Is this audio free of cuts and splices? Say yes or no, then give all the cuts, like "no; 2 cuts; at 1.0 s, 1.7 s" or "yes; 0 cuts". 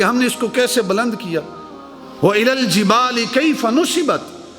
yes; 0 cuts